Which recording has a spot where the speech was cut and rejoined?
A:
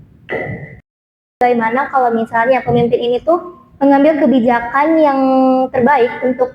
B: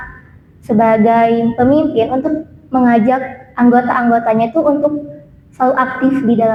A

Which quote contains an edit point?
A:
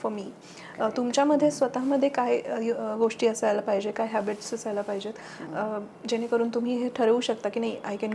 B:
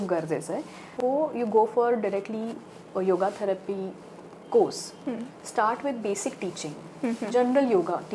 B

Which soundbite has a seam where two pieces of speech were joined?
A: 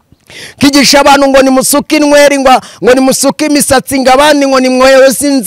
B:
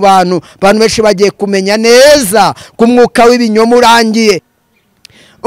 B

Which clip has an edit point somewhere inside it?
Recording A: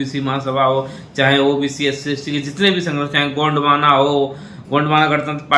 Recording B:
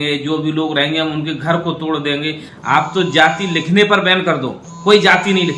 B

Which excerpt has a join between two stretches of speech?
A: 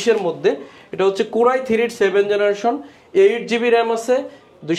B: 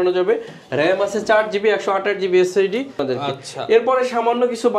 B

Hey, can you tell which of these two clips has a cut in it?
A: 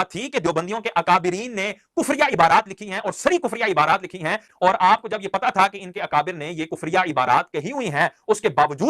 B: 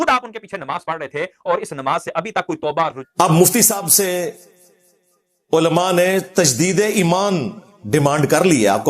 B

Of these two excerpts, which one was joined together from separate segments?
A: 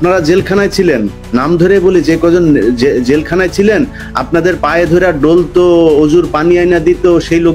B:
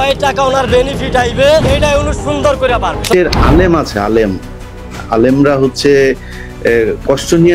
B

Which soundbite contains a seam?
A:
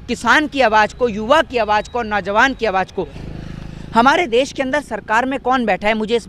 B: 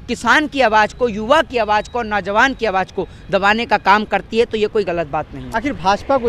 A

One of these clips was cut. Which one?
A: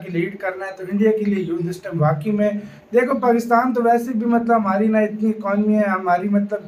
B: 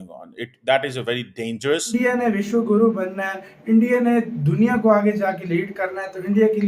B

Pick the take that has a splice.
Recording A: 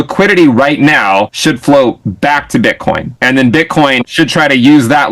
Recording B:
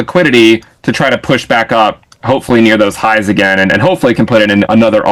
A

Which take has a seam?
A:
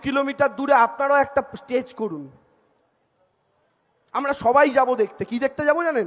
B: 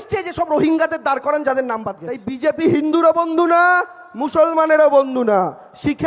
B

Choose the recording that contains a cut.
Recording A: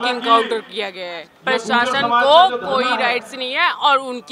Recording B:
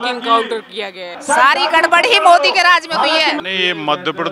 B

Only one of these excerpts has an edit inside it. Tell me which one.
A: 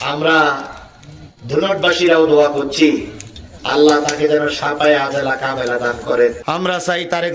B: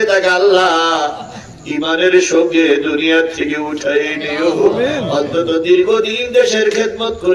A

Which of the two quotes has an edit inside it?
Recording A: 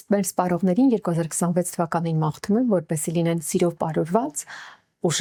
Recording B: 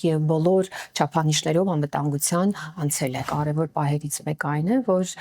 B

